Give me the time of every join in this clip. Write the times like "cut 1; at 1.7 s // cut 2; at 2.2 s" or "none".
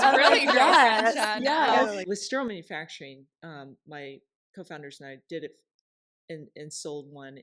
cut 1; at 2.0 s